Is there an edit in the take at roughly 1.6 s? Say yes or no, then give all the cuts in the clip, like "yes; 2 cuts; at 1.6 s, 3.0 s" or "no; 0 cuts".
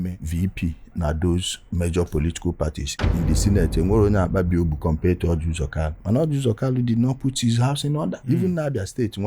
no; 2 cuts; at 3.1 s, 8.2 s